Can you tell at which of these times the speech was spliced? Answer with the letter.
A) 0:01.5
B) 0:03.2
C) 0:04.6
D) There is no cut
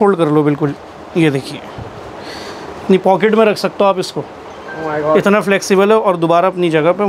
D